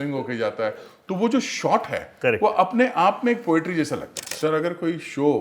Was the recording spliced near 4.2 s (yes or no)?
yes